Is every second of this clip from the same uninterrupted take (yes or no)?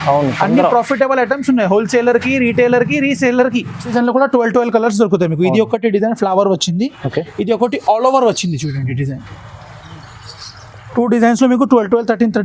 no